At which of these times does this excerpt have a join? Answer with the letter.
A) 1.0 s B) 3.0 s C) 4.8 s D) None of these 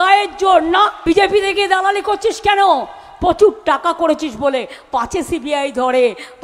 A